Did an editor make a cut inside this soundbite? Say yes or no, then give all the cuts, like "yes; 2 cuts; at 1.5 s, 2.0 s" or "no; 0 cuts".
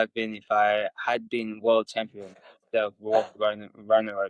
no; 0 cuts